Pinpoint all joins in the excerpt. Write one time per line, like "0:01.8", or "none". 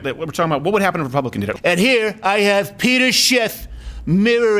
0:01.5